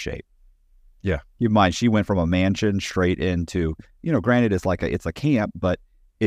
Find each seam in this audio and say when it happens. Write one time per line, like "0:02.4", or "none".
none